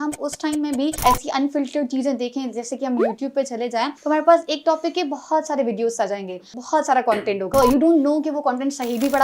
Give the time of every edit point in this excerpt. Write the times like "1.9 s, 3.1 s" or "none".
1.0 s, 4.0 s, 6.5 s, 7.5 s